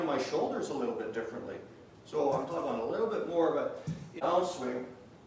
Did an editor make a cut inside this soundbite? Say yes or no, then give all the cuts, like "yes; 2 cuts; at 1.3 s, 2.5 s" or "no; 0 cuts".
yes; 2 cuts; at 2.5 s, 4.1 s